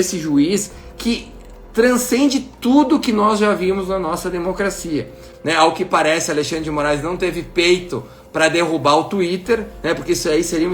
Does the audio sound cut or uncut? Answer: cut